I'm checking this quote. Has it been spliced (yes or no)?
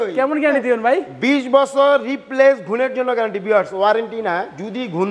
no